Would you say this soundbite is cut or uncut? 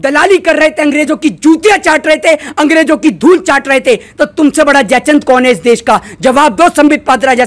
uncut